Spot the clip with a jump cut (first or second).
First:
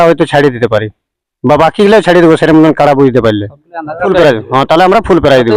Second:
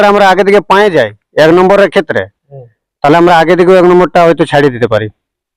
first